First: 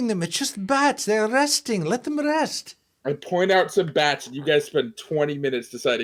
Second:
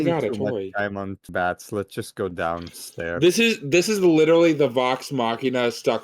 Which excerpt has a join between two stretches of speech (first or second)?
second